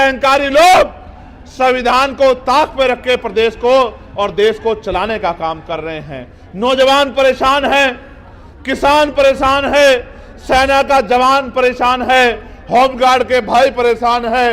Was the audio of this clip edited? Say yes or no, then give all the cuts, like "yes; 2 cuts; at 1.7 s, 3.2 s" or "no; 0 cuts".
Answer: no; 0 cuts